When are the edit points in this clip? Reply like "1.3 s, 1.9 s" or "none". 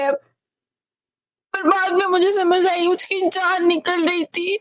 none